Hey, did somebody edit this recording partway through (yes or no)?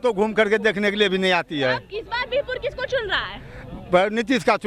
no